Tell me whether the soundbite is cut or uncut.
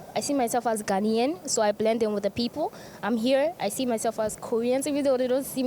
uncut